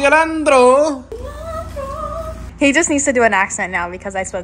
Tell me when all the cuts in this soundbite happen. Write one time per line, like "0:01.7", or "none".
0:01.1
0:02.6